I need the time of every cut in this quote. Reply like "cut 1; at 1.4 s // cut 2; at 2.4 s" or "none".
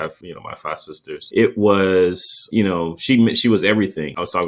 none